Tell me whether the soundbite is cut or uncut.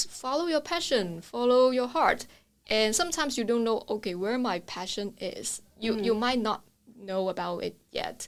uncut